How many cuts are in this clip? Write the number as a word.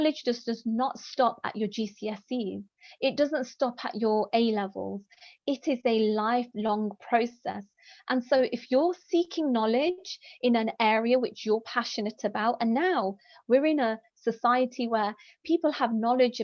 zero